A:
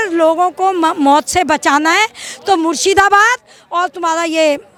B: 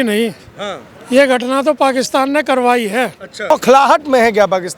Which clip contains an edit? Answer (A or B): B